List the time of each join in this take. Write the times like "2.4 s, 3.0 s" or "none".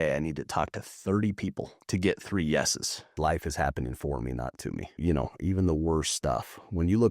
1.7 s, 3.1 s, 5.0 s